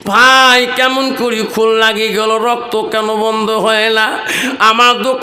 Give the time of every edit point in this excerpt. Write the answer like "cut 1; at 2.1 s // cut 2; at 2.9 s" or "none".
none